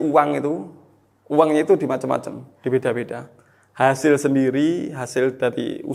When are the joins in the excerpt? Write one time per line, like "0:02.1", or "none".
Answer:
none